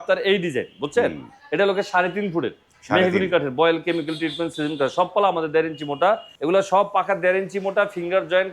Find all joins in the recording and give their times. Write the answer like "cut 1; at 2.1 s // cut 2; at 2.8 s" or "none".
cut 1; at 6.3 s